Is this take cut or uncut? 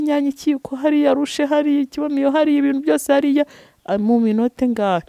uncut